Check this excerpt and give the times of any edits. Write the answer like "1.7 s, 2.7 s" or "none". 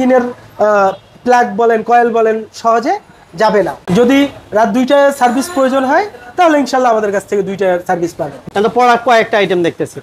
3.8 s, 8.3 s